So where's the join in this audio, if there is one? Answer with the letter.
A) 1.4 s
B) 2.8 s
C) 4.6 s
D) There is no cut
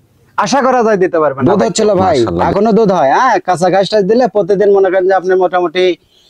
A